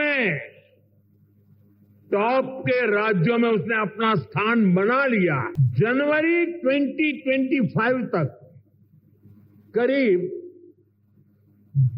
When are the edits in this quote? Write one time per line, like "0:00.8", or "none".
0:05.6